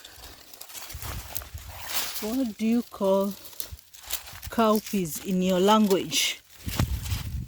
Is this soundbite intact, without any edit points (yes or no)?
no